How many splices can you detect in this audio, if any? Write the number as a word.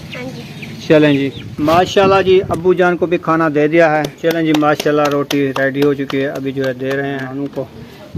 three